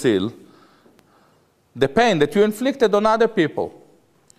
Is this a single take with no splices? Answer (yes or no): yes